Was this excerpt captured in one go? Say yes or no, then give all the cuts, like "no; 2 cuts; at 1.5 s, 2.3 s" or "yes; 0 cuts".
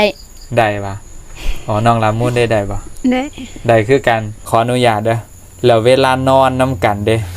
no; 1 cut; at 4.4 s